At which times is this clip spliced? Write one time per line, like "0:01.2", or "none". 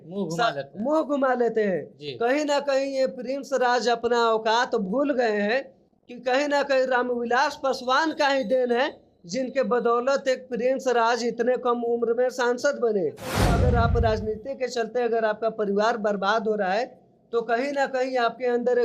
0:13.4